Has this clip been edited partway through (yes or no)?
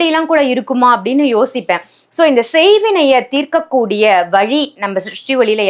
no